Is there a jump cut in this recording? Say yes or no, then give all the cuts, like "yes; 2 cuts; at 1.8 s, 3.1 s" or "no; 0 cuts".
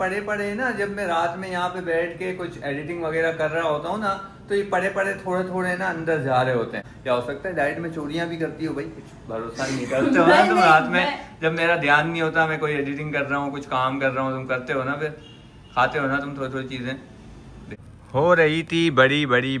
yes; 2 cuts; at 6.8 s, 17.6 s